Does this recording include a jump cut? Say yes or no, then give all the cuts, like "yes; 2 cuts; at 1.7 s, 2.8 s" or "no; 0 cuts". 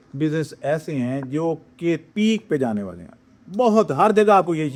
no; 0 cuts